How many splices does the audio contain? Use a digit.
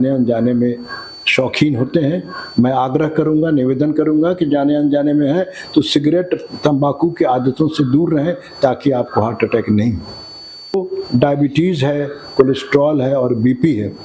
1